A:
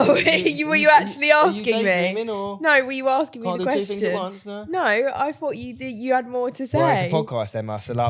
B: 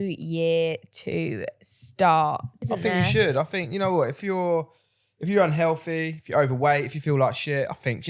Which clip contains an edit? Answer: B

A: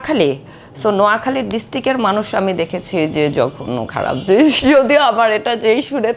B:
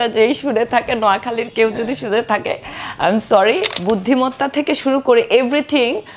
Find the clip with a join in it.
B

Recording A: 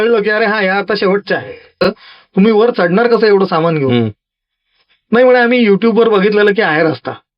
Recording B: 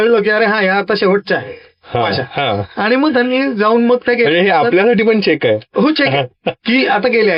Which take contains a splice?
A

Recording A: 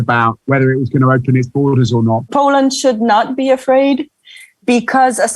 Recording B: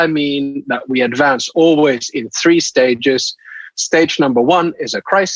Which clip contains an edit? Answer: A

